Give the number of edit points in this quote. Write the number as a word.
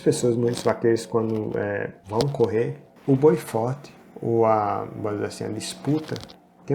two